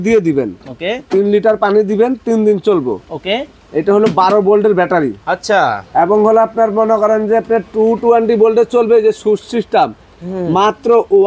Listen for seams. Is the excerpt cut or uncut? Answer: uncut